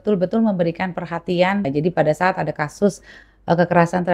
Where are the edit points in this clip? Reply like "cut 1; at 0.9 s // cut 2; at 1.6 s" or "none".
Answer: cut 1; at 1.7 s